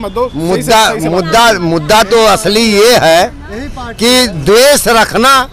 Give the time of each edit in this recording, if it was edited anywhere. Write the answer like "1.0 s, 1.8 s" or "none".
none